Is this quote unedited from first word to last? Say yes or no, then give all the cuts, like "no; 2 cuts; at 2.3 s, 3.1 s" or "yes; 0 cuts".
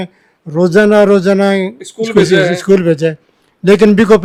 yes; 0 cuts